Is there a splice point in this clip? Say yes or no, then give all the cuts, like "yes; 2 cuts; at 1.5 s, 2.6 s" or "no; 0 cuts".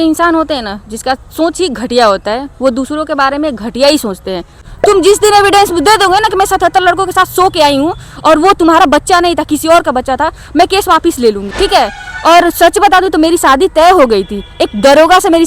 yes; 2 cuts; at 4.5 s, 11.5 s